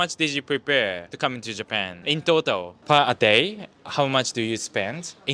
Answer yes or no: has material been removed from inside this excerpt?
yes